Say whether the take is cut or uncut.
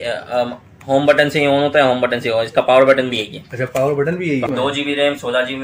cut